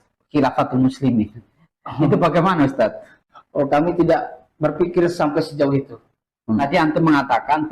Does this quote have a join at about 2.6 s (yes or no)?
no